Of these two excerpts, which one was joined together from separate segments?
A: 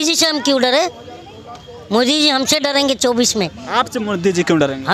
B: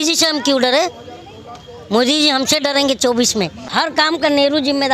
B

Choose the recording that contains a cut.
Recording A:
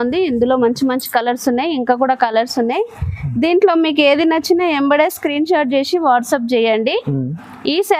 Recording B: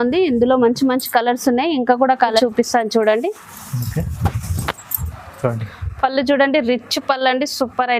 B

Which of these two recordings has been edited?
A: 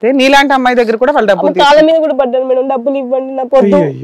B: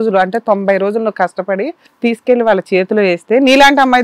B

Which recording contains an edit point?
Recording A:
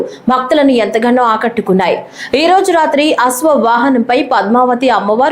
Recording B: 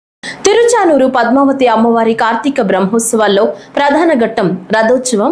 A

